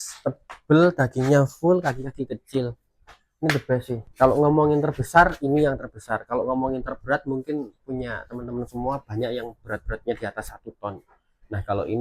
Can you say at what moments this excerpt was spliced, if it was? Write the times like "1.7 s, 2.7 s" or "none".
4.0 s